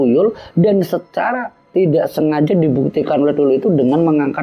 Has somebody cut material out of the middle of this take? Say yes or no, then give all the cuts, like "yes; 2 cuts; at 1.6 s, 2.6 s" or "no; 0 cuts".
no; 0 cuts